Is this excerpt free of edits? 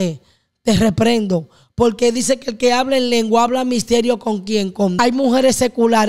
no; 1 cut; at 4.9 s

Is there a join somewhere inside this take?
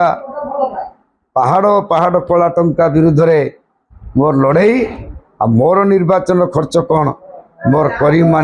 no; 0 cuts

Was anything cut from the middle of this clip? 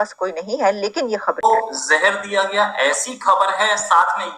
yes; 1 cut; at 1.4 s

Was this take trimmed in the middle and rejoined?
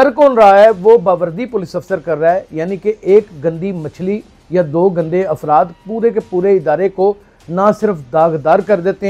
no; 0 cuts

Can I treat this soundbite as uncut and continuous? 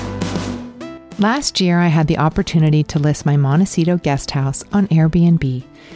no; 1 cut; at 1.0 s

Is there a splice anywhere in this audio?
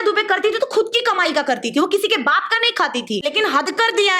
yes; 1 cut; at 3.2 s

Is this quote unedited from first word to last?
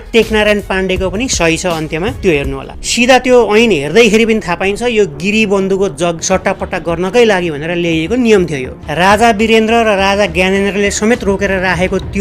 no; 3 cuts; at 2.7 s, 6.2 s, 8.8 s

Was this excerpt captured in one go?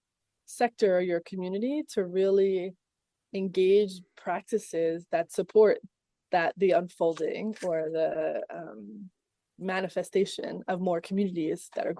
yes; 0 cuts

